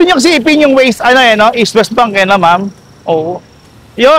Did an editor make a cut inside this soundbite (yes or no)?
no